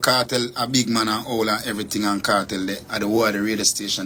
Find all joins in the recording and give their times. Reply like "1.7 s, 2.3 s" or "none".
none